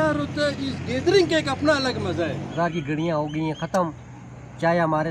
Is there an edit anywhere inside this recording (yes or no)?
yes